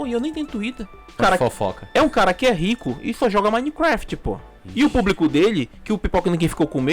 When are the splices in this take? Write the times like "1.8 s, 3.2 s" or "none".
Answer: 1.2 s